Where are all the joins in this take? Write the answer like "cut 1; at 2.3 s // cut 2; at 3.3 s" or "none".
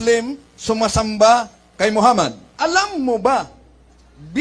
cut 1; at 2.4 s